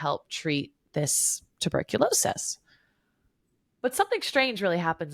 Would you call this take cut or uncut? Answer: uncut